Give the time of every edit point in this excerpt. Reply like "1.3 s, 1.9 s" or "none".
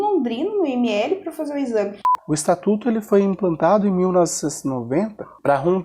2.0 s

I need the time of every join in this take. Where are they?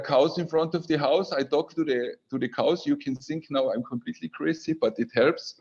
none

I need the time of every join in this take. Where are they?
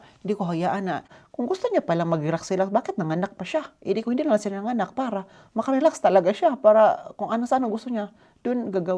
1.2 s

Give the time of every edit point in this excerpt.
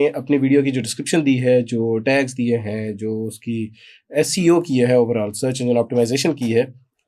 none

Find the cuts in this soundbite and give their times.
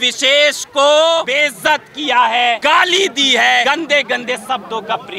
1.3 s, 2.6 s, 3.6 s

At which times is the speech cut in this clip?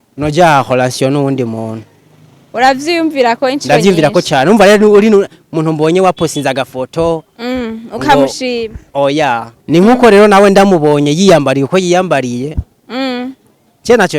9.5 s

